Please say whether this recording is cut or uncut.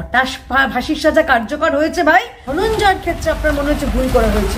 cut